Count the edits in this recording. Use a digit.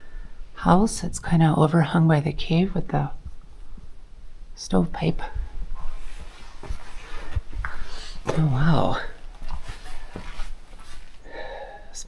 0